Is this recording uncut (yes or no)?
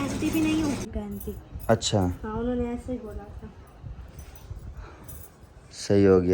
no